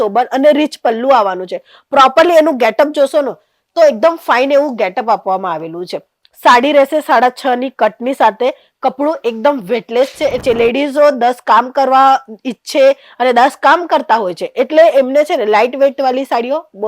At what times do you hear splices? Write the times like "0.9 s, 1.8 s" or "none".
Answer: 10.4 s